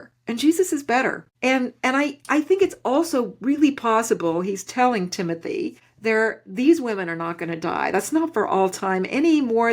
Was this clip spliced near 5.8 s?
yes; 2 cuts; at 1.3 s, 5.8 s

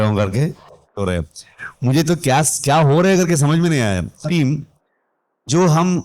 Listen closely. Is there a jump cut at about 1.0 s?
yes; 2 cuts; at 1.0 s, 4.2 s

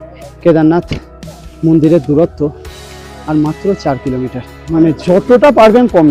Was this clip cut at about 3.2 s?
no; 1 cut; at 4.5 s

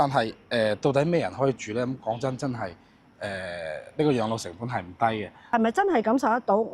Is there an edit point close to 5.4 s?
yes; 1 cut; at 5.4 s

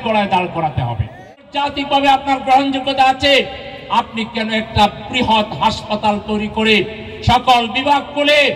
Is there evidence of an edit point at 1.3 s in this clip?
yes; 1 cut; at 1.3 s

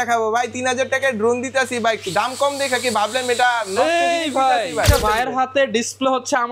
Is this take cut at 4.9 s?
yes; 1 cut; at 4.9 s

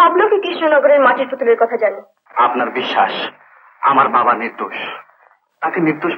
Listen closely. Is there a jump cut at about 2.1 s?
yes; 1 cut; at 2.1 s

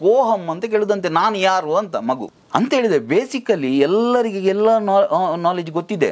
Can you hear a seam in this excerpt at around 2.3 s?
yes; 1 cut; at 2.3 s

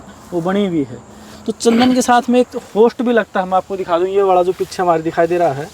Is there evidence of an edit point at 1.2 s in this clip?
no; 0 cuts

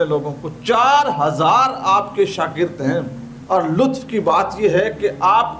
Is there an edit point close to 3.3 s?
yes; 1 cut; at 3.3 s

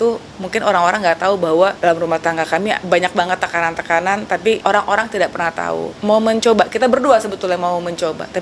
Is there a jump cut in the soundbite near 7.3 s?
no; 4 cuts; at 1.8 s, 2.8 s, 4.6 s, 5.9 s

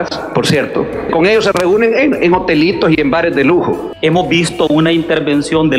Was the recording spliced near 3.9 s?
yes; 2 cuts; at 1.1 s, 3.9 s

